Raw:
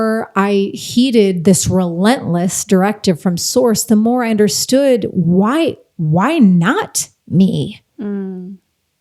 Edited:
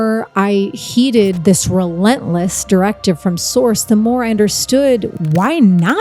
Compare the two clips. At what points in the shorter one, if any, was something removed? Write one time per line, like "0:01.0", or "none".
0:05.1

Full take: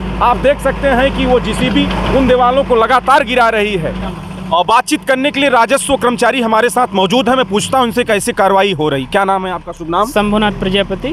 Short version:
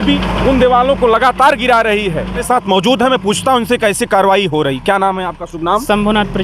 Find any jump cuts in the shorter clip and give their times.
0:02.4

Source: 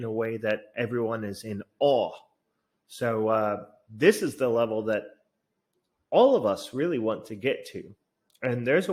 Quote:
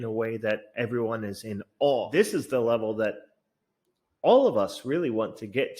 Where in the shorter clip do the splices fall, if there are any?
0:02.1

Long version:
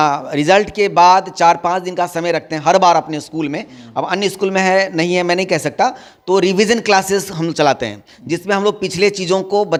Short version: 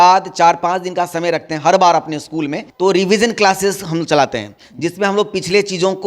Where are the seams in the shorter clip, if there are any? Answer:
0:02.6

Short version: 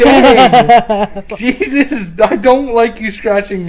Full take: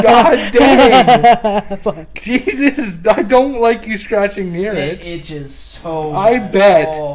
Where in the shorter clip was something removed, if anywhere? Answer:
0:01.3

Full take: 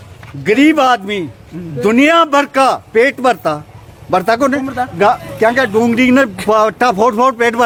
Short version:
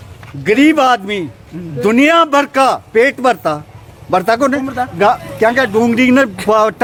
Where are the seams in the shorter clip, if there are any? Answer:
none

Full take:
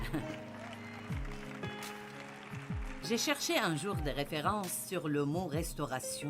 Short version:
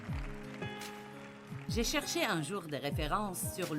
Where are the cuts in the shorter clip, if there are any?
0:01.7

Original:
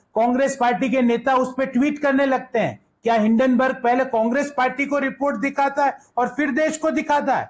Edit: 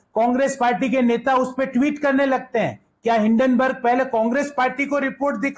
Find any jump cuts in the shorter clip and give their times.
none

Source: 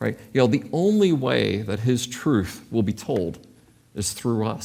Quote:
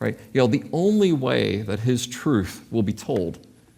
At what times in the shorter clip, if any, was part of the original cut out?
none

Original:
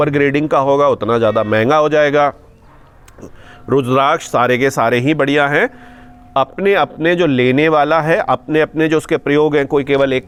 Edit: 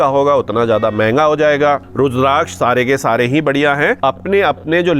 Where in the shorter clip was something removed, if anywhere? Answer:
0:01.9
0:04.0

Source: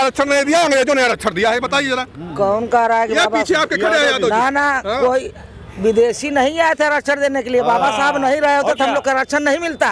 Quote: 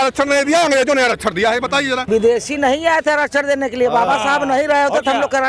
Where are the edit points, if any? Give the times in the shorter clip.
0:02.0

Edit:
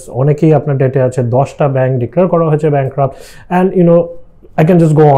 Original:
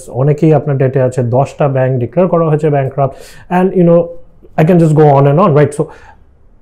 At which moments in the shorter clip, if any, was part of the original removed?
none

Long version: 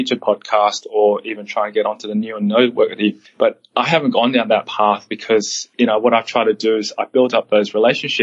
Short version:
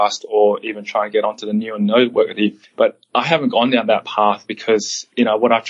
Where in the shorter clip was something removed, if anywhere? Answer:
none

